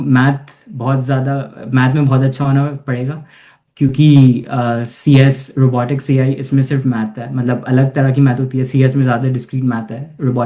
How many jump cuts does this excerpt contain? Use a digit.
0